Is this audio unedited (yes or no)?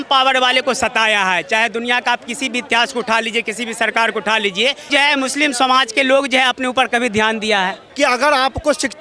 no